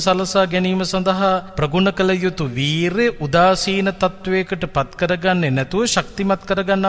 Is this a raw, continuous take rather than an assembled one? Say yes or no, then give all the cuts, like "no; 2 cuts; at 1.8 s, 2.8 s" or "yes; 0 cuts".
no; 1 cut; at 1.5 s